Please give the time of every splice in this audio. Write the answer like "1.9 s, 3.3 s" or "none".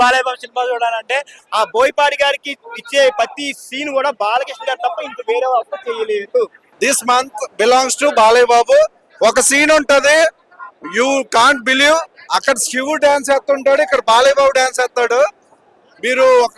1.4 s, 6.7 s, 9.0 s